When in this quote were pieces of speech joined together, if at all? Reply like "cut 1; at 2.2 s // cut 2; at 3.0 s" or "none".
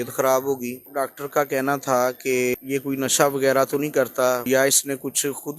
cut 1; at 0.9 s // cut 2; at 2.5 s // cut 3; at 4.5 s